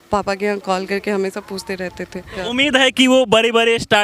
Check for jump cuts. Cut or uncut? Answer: cut